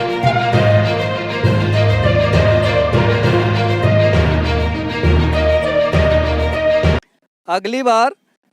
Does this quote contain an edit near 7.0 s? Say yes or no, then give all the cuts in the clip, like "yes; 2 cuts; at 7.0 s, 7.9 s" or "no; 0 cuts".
yes; 1 cut; at 7.0 s